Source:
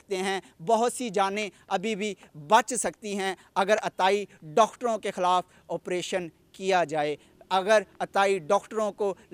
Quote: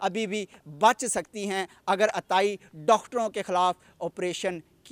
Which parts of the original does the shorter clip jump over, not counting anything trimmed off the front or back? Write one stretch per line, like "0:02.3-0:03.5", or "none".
none